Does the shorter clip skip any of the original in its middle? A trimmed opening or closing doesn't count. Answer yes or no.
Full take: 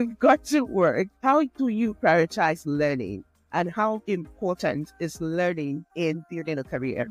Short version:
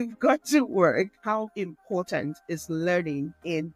yes